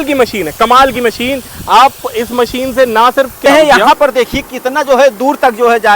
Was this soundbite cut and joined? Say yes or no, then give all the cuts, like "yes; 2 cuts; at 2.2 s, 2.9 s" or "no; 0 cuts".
yes; 1 cut; at 3.4 s